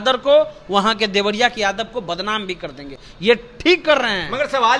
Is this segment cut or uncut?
uncut